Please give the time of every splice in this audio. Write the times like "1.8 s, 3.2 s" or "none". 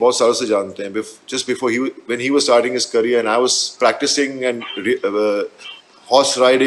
none